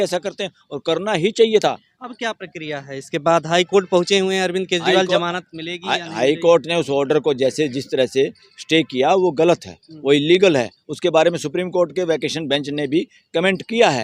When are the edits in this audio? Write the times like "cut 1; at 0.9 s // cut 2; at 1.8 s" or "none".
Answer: none